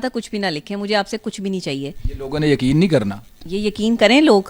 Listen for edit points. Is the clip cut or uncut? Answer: uncut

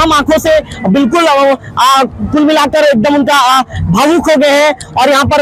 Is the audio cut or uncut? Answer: uncut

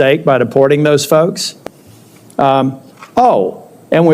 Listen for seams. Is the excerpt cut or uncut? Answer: cut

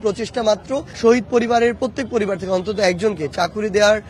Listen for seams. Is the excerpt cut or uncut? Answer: cut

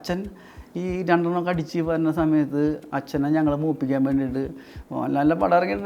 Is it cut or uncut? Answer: uncut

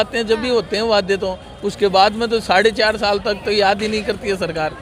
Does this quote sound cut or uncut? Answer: uncut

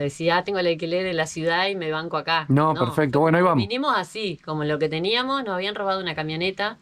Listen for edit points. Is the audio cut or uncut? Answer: uncut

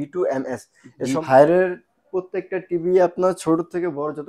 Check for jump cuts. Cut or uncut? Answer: cut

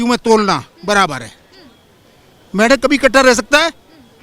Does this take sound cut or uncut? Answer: uncut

